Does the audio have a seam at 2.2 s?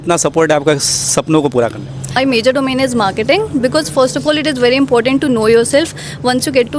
yes; 1 cut; at 2.2 s

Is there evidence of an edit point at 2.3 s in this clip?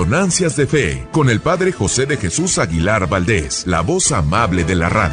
no; 2 cuts; at 1.0 s, 3.5 s

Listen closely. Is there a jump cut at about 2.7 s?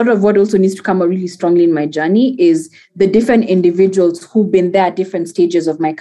no; 0 cuts

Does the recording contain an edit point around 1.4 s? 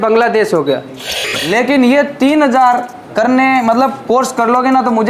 yes; 1 cut; at 1.4 s

